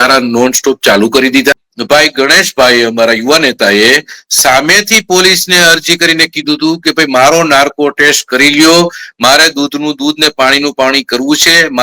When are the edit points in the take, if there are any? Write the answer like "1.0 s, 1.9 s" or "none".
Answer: 1.7 s